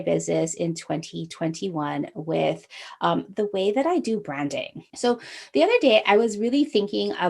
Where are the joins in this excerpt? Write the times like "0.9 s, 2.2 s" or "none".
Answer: 4.8 s